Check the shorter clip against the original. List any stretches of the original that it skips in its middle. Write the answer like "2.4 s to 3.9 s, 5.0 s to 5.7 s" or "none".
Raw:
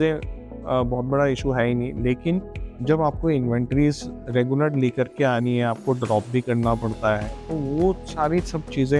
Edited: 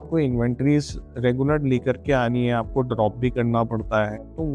none